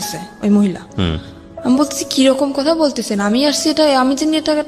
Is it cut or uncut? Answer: uncut